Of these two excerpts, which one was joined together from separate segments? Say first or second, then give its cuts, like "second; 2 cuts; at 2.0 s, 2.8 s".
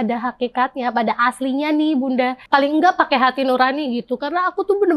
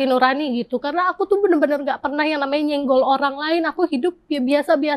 first; 1 cut; at 2.4 s